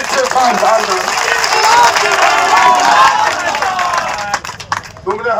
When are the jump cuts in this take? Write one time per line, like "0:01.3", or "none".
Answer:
none